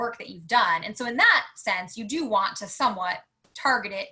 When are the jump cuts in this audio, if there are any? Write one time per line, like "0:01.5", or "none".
none